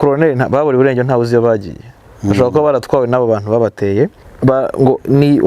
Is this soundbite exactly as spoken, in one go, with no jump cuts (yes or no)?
no